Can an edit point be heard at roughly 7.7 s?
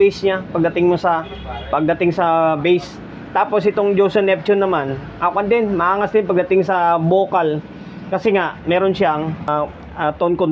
no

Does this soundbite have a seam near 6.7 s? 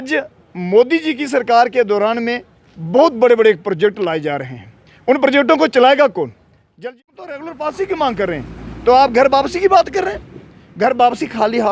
yes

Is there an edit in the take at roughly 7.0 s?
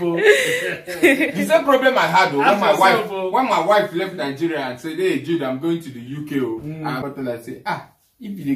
yes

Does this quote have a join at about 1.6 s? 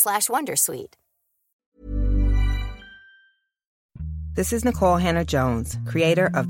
no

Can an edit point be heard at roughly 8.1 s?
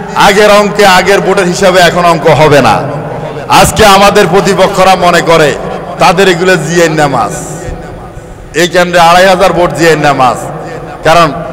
no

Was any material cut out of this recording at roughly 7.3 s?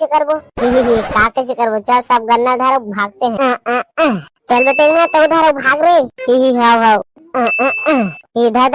no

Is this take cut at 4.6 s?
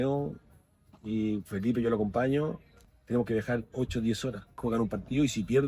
yes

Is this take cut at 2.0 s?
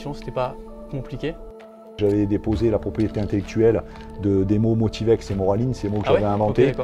yes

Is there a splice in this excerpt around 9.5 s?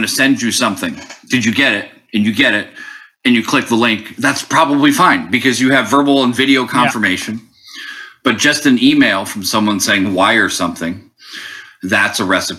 no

